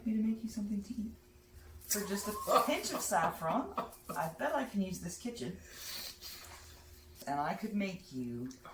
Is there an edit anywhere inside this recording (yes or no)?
yes